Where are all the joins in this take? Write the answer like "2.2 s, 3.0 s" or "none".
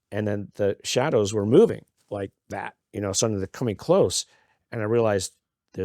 1.9 s